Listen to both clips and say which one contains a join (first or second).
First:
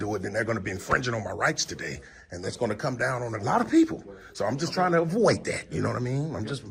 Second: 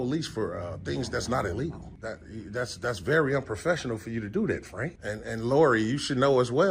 second